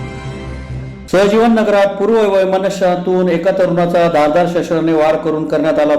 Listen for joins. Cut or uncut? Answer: cut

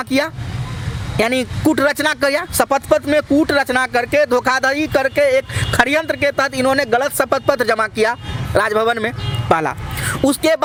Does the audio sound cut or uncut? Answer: uncut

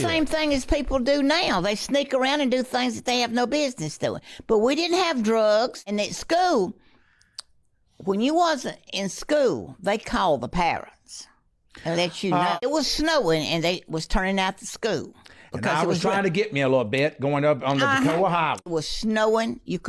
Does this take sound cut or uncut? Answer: cut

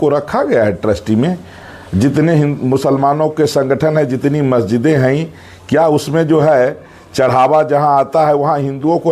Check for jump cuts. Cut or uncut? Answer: uncut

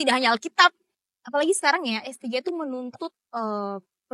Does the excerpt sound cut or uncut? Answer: cut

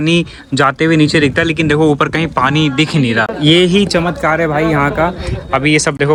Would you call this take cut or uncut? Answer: uncut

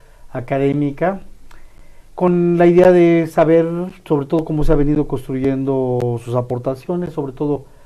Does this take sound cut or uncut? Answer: uncut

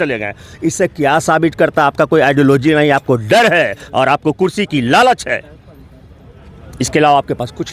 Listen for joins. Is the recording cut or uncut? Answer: uncut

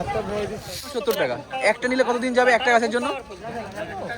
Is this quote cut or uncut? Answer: cut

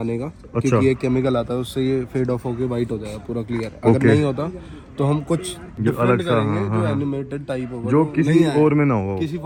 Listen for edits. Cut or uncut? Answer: uncut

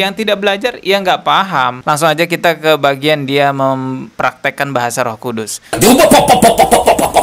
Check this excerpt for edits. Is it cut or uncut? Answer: cut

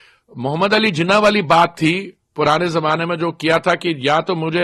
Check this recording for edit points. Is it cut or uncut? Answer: uncut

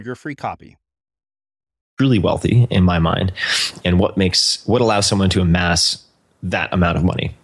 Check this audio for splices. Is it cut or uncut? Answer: cut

